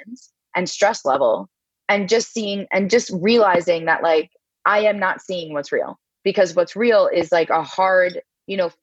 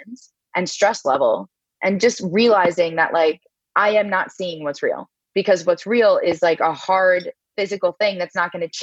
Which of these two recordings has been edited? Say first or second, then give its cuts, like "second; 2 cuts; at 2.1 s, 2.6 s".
second; 2 cuts; at 1.7 s, 7.5 s